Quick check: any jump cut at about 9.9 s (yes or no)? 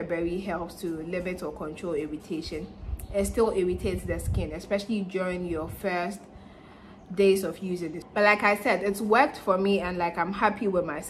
no